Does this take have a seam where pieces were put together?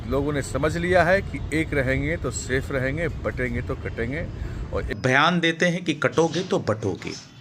yes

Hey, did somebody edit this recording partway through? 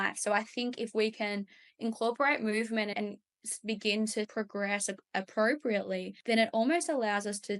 yes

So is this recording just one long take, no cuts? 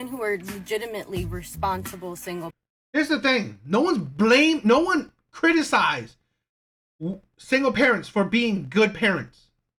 yes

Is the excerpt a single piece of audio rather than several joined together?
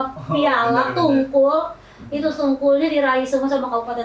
yes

